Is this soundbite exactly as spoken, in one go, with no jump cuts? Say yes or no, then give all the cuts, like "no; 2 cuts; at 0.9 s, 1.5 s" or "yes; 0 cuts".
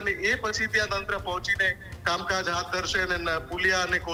yes; 0 cuts